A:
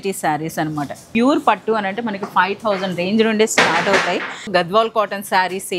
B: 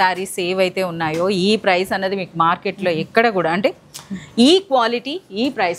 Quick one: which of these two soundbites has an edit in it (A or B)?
A